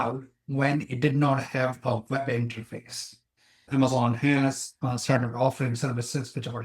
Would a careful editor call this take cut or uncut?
cut